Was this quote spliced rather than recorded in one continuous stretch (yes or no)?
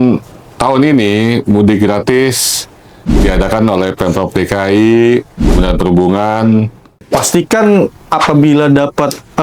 yes